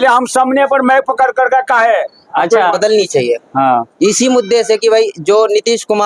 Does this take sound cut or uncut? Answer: cut